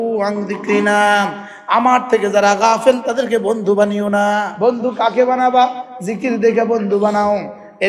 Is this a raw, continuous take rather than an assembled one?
no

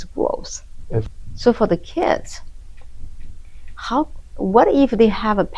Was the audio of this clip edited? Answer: yes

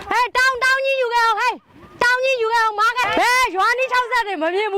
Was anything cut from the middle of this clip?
yes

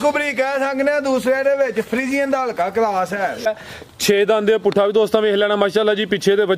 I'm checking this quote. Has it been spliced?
yes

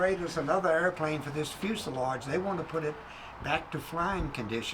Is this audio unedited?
yes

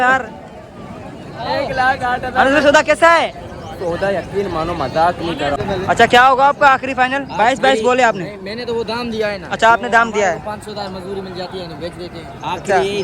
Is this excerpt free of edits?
no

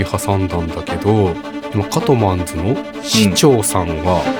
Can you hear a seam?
no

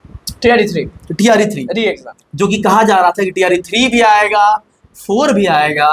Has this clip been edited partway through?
no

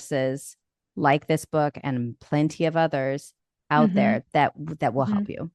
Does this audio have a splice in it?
no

